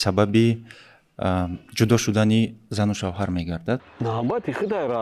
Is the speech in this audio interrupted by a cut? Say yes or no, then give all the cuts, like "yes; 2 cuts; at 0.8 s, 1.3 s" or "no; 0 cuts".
yes; 1 cut; at 3.9 s